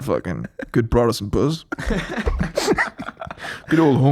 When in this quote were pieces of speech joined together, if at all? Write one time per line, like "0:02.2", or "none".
none